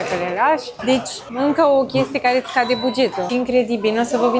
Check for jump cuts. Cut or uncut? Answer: cut